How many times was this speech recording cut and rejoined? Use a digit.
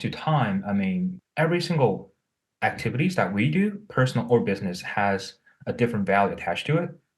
1